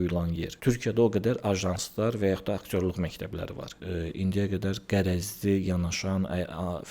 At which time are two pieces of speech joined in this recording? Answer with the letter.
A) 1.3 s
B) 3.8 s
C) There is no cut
B